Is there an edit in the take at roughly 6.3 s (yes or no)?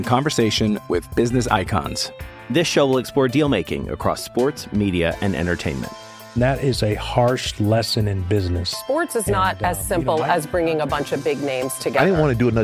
no